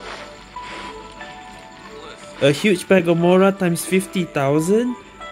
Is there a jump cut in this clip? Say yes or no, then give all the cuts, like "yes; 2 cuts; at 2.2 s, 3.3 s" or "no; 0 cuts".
no; 0 cuts